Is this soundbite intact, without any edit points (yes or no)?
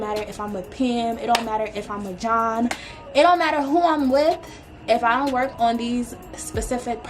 yes